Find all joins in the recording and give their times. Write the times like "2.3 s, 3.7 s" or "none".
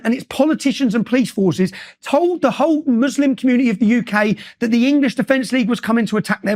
none